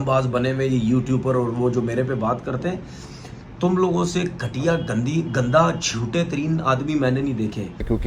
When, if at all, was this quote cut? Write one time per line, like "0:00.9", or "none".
none